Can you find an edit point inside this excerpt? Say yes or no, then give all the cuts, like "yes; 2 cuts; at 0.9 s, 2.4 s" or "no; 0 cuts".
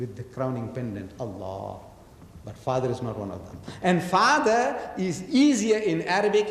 no; 0 cuts